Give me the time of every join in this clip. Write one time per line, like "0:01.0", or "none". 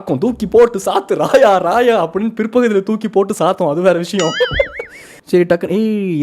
0:05.1